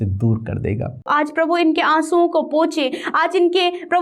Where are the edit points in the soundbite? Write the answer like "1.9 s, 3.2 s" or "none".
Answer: 1.1 s